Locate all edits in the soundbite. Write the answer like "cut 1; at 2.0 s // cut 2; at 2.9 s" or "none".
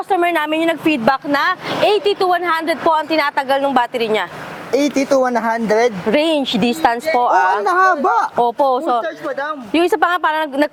none